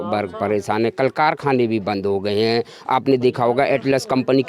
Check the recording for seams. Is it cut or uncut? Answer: uncut